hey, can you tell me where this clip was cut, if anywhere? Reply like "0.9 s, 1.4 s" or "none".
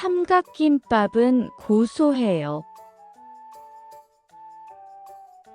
none